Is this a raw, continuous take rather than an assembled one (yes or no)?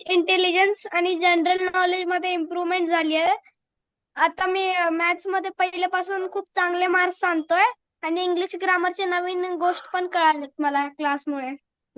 yes